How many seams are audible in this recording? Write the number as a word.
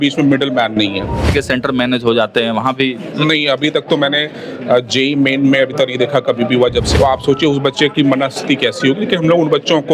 two